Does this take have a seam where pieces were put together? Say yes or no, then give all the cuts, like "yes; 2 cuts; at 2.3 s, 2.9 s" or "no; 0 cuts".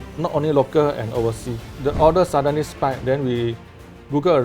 yes; 1 cut; at 1.7 s